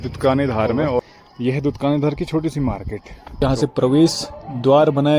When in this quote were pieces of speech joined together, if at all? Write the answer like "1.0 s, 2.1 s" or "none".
1.0 s, 3.4 s